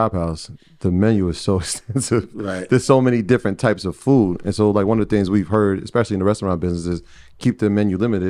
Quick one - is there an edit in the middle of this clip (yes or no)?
no